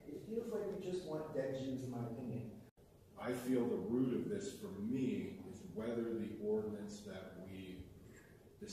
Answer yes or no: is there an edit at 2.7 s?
yes